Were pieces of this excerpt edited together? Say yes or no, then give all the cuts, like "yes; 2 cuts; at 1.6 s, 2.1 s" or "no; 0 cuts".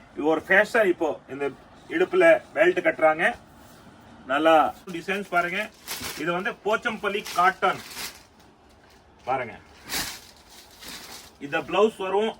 yes; 1 cut; at 5.0 s